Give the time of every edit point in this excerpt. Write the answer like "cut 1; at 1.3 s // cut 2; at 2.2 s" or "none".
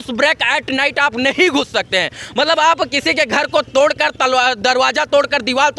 none